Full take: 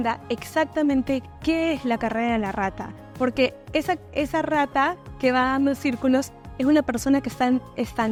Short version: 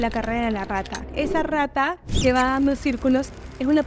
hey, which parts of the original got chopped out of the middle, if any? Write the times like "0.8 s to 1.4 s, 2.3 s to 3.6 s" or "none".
2.9 s to 4.1 s